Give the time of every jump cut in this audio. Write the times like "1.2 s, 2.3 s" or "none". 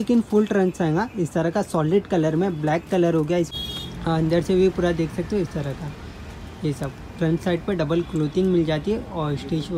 3.5 s